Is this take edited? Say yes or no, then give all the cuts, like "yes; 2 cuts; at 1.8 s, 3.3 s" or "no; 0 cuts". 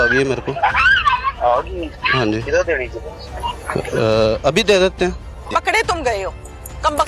yes; 1 cut; at 5.5 s